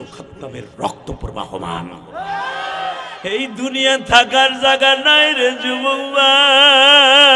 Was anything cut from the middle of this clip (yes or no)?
yes